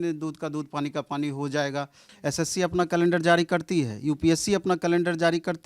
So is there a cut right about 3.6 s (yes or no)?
no